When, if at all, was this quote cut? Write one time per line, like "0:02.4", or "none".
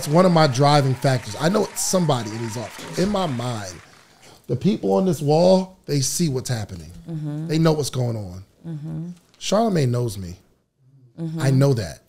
none